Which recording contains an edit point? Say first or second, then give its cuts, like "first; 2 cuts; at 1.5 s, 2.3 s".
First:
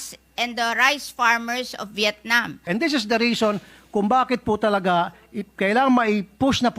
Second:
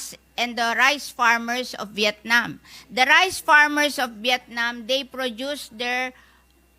first; 1 cut; at 2.6 s